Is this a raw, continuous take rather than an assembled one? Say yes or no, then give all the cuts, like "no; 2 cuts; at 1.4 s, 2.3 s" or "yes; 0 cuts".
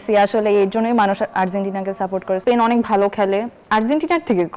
no; 2 cuts; at 2.4 s, 3.6 s